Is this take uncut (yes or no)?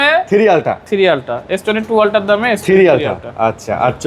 yes